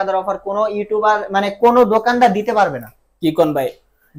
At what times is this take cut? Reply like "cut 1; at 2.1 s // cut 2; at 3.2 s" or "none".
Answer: none